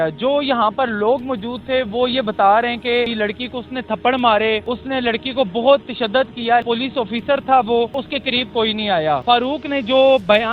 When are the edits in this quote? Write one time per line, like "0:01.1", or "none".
0:03.1
0:04.7
0:06.6
0:08.1
0:09.2